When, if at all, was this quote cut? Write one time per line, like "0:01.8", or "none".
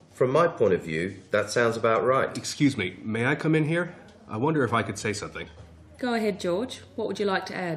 0:02.4